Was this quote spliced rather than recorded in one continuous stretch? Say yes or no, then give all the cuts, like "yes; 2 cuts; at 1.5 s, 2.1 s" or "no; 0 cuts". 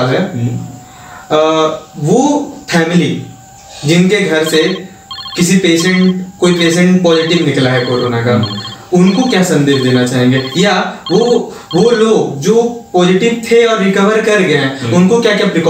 no; 0 cuts